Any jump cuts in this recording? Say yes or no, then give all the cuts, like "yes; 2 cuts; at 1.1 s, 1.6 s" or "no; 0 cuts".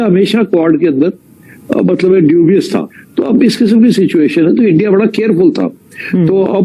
no; 0 cuts